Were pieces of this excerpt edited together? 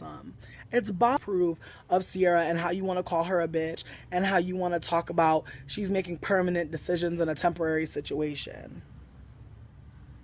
no; 0 cuts

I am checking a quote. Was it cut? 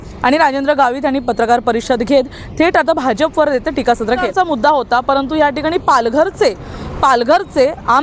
yes; 1 cut; at 4.3 s

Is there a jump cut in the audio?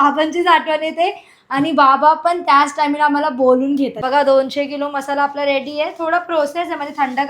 yes; 1 cut; at 4.0 s

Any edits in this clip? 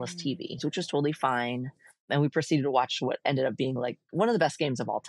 no; 0 cuts

